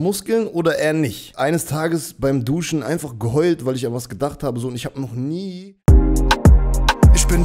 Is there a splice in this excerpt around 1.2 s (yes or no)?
yes